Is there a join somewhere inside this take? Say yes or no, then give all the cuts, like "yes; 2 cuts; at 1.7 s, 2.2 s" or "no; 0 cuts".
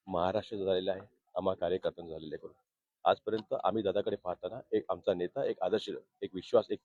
no; 0 cuts